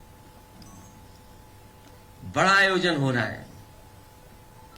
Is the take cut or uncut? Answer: uncut